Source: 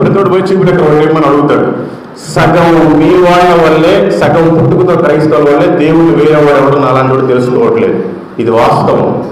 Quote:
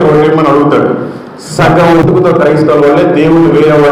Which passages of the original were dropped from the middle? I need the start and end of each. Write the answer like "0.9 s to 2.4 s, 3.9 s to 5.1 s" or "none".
2.8 s to 4.7 s

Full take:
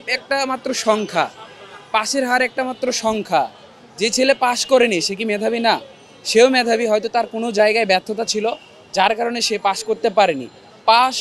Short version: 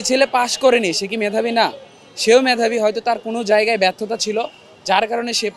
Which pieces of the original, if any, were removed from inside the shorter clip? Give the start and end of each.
none

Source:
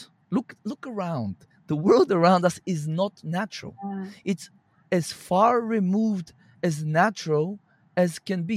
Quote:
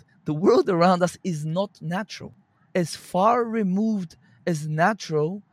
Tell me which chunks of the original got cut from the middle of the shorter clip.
3.7 s to 4.5 s

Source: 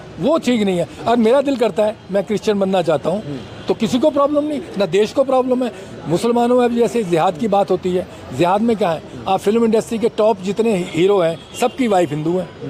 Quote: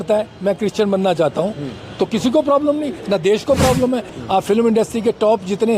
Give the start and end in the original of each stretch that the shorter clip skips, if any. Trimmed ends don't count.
5.8 s to 9.1 s

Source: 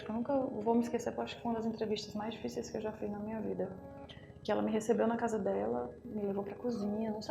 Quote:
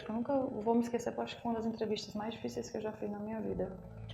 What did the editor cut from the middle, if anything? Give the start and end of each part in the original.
none

